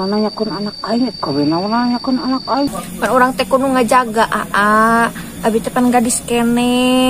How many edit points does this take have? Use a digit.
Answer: 1